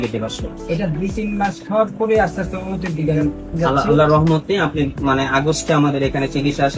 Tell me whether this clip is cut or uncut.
uncut